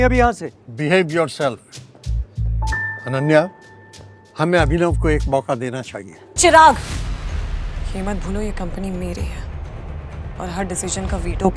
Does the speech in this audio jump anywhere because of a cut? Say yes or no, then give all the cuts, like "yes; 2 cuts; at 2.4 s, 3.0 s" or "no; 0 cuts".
yes; 1 cut; at 6.2 s